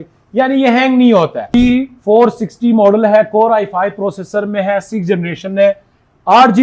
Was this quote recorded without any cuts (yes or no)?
no